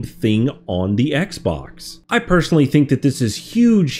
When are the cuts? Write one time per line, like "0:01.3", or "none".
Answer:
0:02.0